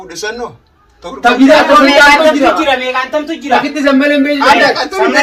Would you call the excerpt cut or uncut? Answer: uncut